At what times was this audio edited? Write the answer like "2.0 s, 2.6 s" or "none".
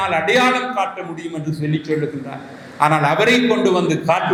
none